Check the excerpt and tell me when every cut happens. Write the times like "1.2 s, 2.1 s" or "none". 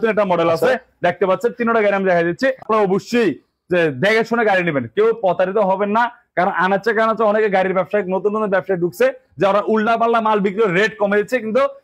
2.6 s